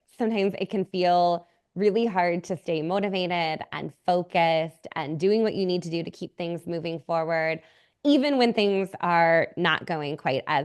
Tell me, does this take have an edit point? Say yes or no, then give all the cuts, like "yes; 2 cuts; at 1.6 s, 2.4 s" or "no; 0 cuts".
no; 0 cuts